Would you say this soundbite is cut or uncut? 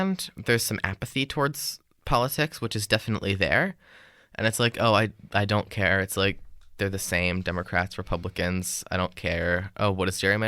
uncut